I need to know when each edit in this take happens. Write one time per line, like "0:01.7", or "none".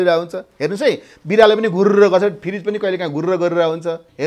none